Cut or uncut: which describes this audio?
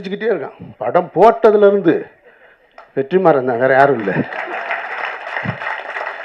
uncut